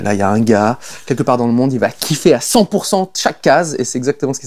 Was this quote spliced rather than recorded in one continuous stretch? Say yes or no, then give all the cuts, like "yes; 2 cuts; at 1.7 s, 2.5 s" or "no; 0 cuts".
no; 0 cuts